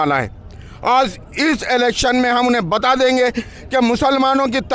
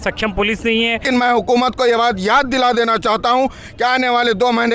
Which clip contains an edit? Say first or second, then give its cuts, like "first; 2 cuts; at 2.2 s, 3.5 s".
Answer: second; 1 cut; at 1.0 s